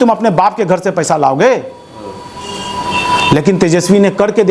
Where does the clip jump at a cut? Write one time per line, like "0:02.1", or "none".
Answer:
none

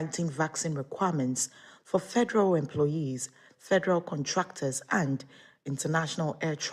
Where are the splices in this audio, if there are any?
none

